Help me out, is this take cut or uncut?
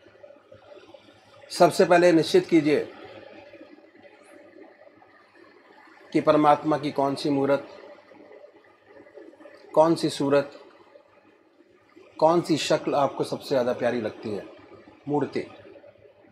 uncut